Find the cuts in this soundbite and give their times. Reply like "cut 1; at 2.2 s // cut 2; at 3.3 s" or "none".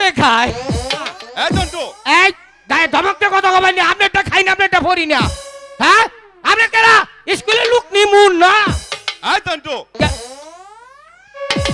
cut 1; at 1.2 s